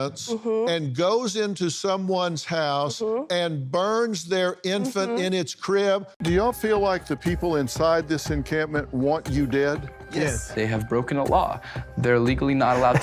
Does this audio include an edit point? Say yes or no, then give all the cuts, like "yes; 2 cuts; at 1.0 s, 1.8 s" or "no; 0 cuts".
no; 0 cuts